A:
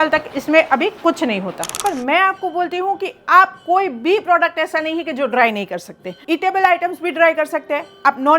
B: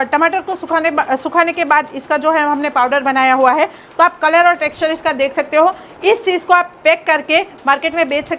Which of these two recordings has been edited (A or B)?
A